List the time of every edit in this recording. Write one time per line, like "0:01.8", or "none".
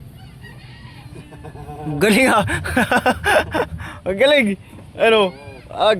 none